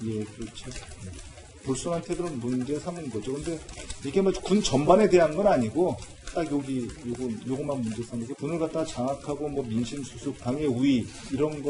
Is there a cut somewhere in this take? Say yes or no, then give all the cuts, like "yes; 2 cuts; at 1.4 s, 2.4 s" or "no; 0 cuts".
yes; 1 cut; at 8.5 s